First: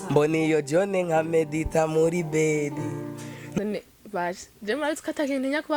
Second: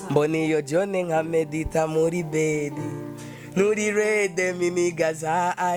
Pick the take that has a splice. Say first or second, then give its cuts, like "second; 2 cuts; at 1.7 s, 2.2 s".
first; 1 cut; at 3.6 s